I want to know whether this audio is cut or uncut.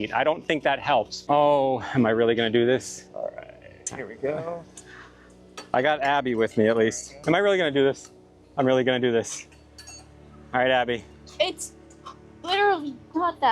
cut